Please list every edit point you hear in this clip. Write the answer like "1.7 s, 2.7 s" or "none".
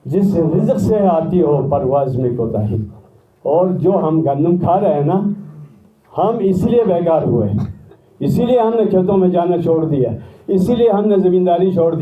none